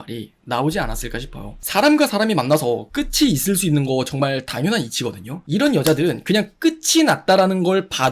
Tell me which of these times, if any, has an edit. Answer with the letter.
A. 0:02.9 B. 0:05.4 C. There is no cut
B